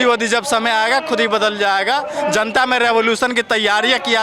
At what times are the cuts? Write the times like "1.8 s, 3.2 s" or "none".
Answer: none